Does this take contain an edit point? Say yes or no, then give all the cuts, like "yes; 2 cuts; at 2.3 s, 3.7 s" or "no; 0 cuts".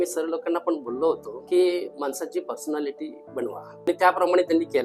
yes; 3 cuts; at 1.3 s, 1.9 s, 3.9 s